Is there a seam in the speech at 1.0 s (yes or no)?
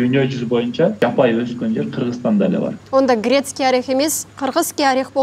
yes